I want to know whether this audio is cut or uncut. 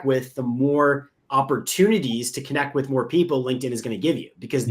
cut